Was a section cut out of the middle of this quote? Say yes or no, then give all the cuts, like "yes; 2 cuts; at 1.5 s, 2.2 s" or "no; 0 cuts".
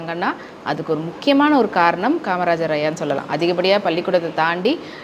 no; 0 cuts